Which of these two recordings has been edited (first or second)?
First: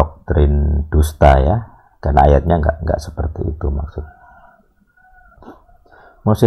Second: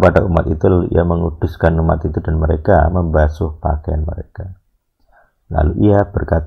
first